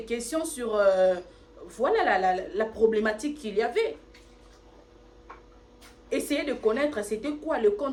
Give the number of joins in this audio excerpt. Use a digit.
0